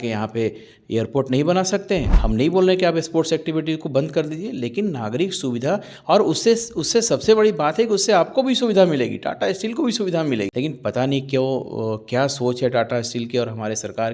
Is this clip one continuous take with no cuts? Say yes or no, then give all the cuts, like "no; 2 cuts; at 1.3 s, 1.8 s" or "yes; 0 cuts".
no; 2 cuts; at 2.2 s, 10.5 s